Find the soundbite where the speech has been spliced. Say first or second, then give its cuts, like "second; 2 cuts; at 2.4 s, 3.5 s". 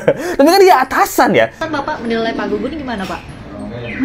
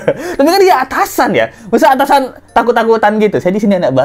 first; 1 cut; at 1.6 s